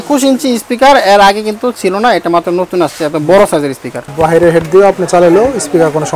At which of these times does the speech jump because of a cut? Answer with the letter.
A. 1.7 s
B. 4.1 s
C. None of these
B